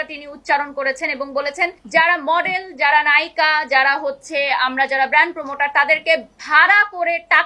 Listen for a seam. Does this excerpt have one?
yes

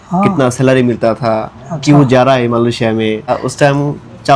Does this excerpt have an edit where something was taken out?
yes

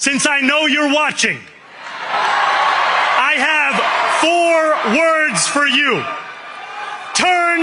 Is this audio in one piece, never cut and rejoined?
yes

